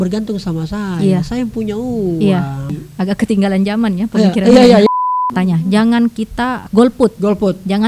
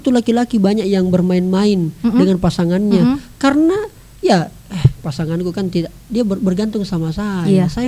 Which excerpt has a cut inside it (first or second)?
first